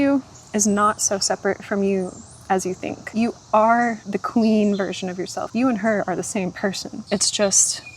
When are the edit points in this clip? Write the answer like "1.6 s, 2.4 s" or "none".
3.0 s, 4.1 s, 5.3 s, 6.9 s